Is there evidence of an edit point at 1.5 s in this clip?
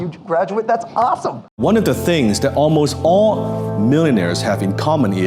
yes; 1 cut; at 1.5 s

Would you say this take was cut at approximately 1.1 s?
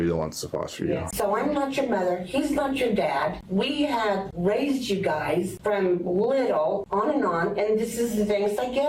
yes; 1 cut; at 1.1 s

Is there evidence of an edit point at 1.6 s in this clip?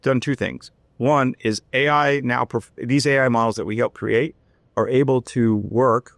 no; 0 cuts

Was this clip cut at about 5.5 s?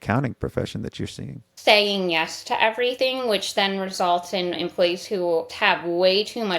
yes; 3 cuts; at 1.5 s, 3.0 s, 5.5 s

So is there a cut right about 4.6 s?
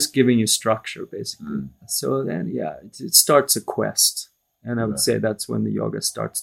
no; 1 cut; at 1.8 s

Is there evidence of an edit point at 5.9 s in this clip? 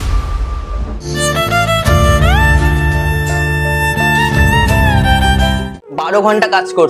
yes; 1 cut; at 5.9 s

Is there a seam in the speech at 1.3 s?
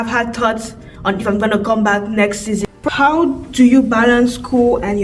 no; 1 cut; at 2.6 s

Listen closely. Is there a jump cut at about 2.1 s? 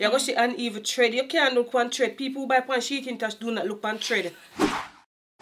no; 1 cut; at 4.5 s

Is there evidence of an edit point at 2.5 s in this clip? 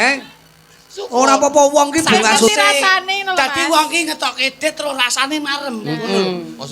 yes; 1 cut; at 2.5 s

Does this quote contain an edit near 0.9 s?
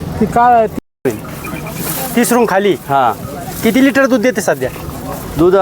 yes; 1 cut; at 0.9 s

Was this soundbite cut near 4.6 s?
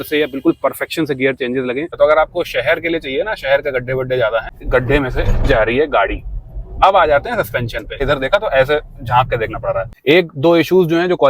yes; 4 cuts; at 1.9 s, 4.6 s, 8.0 s, 9.9 s

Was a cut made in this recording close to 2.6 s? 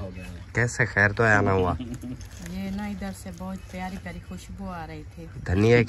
no; 0 cuts

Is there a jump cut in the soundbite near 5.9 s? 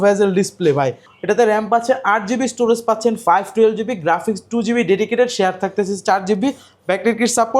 no; 1 cut; at 1.1 s

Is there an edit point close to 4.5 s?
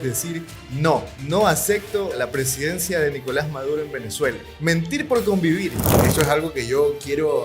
yes; 4 cuts; at 1.1 s, 2.2 s, 4.5 s, 6.0 s

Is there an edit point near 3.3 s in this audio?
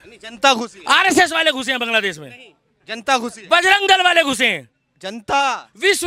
no; 0 cuts

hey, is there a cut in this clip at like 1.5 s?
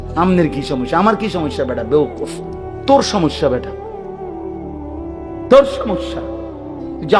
no; 2 cuts; at 3.6 s, 5.5 s

